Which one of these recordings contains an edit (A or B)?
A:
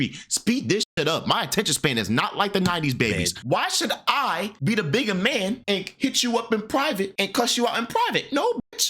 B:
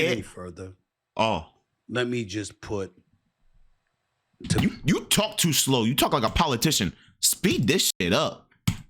A